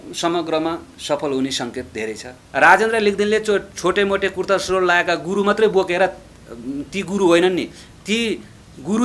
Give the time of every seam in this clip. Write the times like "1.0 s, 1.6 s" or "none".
2.4 s